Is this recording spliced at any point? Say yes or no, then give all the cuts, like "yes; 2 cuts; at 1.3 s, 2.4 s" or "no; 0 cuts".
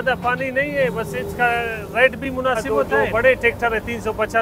yes; 1 cut; at 2.7 s